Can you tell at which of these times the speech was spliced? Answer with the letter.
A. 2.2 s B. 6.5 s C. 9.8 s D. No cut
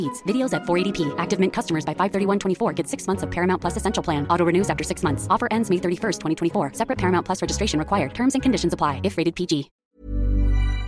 C